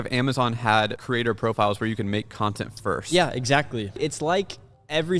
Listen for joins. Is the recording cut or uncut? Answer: cut